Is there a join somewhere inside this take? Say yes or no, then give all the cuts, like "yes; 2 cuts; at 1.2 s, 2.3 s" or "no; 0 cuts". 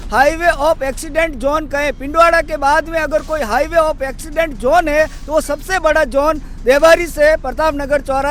no; 0 cuts